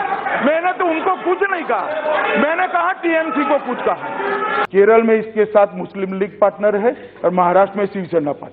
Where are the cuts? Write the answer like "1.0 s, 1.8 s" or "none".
4.6 s